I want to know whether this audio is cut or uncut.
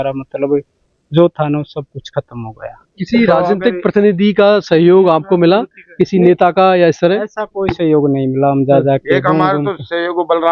uncut